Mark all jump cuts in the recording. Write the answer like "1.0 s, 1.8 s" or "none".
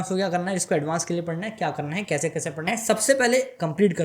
2.6 s